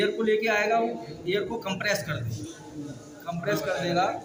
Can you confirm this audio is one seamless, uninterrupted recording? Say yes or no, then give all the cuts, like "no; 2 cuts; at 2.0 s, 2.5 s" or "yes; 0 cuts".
yes; 0 cuts